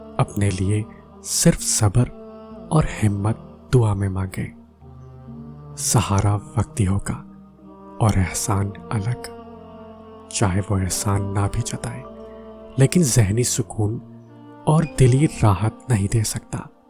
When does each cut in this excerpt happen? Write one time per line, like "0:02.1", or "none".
none